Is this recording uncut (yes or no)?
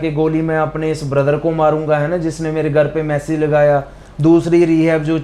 yes